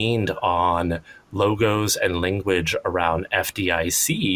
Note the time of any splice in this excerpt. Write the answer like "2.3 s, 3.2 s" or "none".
none